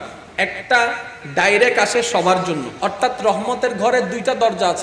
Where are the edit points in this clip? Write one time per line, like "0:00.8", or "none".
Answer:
0:02.7